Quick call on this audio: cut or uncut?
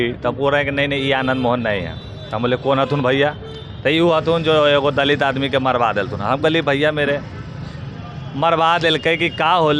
uncut